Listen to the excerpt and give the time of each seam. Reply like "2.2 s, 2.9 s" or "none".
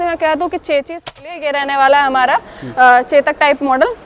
1.3 s